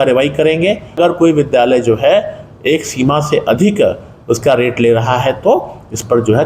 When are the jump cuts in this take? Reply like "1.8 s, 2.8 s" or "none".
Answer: 1.0 s